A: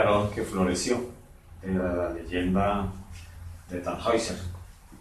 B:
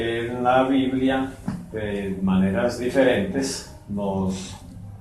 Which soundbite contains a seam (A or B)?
A